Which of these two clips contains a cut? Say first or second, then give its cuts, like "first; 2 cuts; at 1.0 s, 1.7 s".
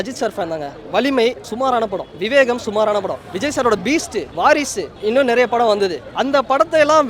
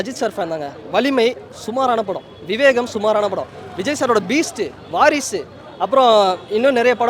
first; 5 cuts; at 1.8 s, 3.2 s, 4.3 s, 5.0 s, 6.1 s